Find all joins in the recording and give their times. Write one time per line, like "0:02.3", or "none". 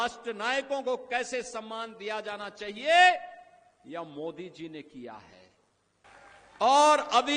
0:06.1